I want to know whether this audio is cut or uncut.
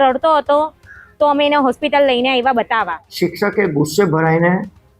cut